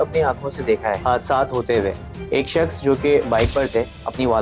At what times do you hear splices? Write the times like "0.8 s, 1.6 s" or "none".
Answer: 1.0 s, 2.1 s